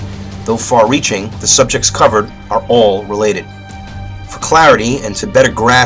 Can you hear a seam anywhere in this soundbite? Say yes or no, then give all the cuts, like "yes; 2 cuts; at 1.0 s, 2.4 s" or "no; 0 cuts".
no; 0 cuts